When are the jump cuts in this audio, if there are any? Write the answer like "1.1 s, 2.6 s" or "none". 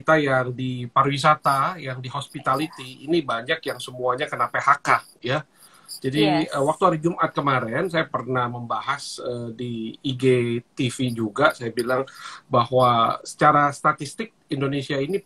none